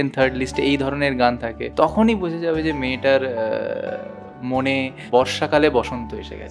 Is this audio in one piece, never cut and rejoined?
no; 2 cuts; at 1.7 s, 5.0 s

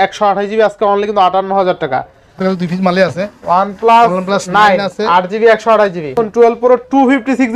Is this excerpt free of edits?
no; 2 cuts; at 2.4 s, 6.1 s

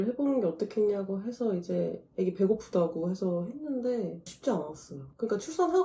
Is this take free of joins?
yes; 0 cuts

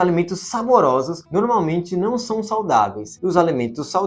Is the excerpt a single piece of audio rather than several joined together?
no; 2 cuts; at 1.2 s, 3.1 s

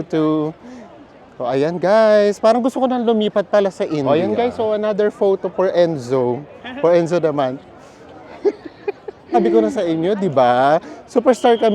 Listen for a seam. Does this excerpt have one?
yes; 2 cuts; at 4.1 s, 9.3 s

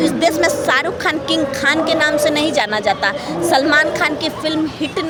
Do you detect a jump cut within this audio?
no; 0 cuts

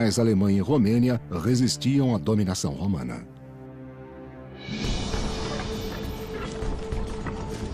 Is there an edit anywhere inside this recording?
yes; 1 cut; at 1.4 s

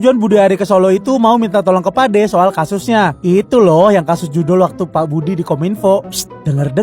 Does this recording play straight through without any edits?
yes; 0 cuts

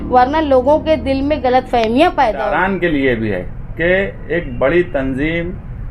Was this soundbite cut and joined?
yes; 1 cut; at 2.6 s

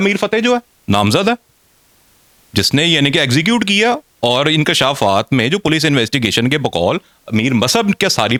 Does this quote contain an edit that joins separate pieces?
no; 0 cuts

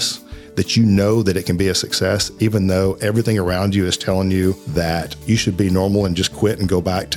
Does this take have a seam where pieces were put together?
yes; 1 cut; at 5.0 s

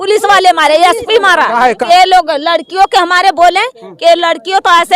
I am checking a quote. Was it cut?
yes; 1 cut; at 1.8 s

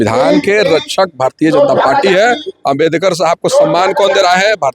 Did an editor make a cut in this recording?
no; 0 cuts

